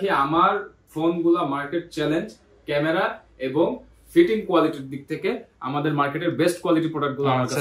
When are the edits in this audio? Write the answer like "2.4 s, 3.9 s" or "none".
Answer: none

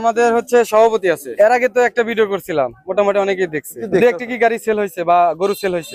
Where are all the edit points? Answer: 1.3 s, 3.8 s

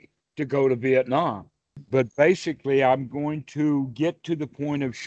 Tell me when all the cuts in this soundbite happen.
1.8 s

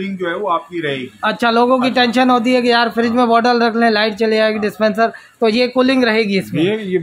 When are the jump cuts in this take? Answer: none

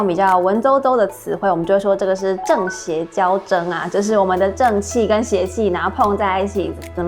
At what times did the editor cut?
none

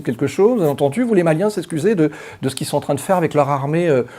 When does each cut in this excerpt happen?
none

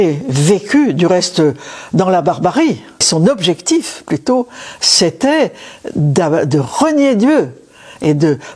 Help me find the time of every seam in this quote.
3.1 s

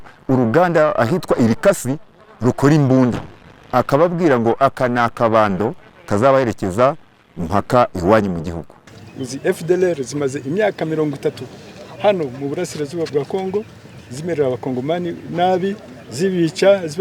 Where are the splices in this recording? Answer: 9.3 s

